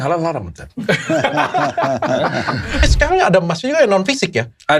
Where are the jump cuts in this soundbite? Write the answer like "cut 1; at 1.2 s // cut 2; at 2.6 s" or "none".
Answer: cut 1; at 2.9 s